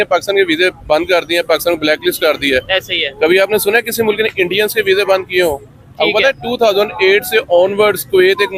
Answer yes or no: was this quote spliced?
no